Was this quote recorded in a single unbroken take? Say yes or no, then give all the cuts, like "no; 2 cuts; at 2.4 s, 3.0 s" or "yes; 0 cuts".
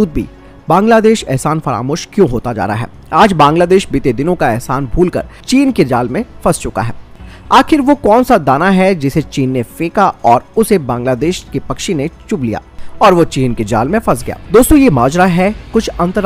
yes; 0 cuts